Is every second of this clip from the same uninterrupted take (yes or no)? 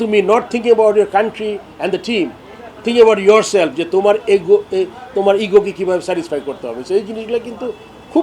yes